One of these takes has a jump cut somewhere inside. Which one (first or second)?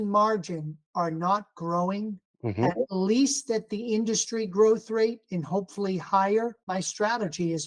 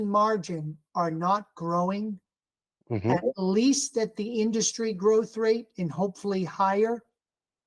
first